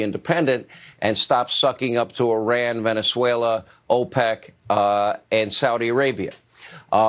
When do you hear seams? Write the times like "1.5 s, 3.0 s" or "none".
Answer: none